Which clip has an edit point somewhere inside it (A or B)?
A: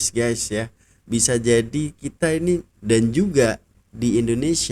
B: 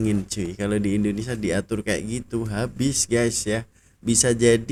A